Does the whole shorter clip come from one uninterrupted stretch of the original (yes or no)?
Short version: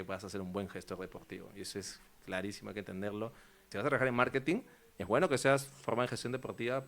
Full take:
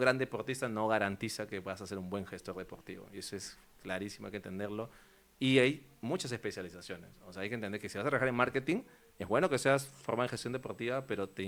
no